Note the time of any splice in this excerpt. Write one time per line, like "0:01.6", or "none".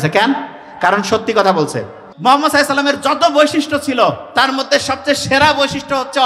0:02.1